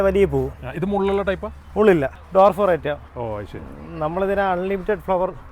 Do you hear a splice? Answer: yes; 1 cut; at 2.2 s

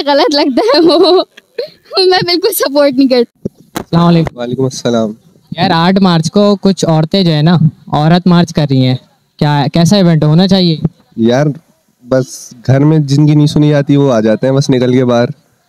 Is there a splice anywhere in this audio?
no; 0 cuts

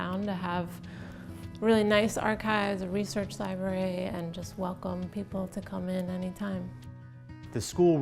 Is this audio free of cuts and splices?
no; 1 cut; at 6.9 s

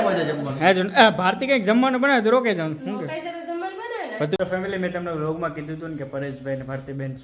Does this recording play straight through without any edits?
no; 1 cut; at 4.4 s

